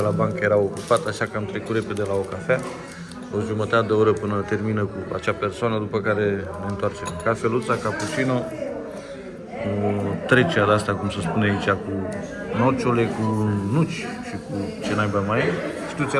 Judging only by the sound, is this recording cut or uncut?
uncut